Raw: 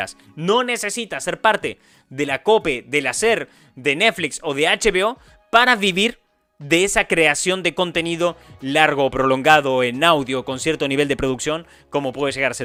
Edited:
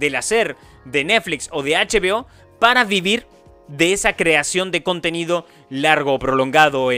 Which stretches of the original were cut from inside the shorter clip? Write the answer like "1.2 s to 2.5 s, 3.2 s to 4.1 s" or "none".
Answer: none